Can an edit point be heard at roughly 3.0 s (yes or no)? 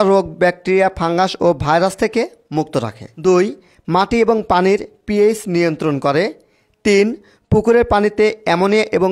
yes